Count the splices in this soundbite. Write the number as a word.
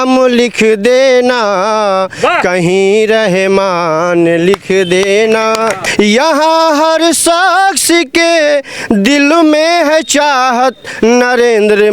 one